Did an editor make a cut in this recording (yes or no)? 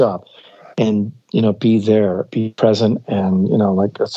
no